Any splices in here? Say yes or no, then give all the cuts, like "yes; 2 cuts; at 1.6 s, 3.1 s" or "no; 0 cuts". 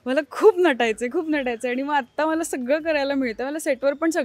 no; 0 cuts